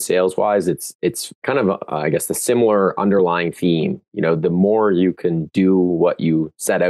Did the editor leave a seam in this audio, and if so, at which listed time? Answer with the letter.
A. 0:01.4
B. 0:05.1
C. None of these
A